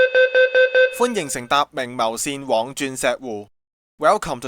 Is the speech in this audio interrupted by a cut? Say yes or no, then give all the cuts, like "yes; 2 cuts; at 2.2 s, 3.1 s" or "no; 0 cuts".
yes; 1 cut; at 0.9 s